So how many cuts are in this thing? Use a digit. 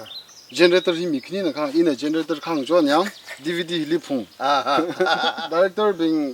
1